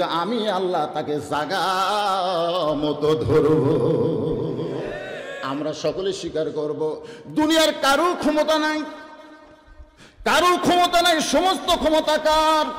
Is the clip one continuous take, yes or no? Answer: yes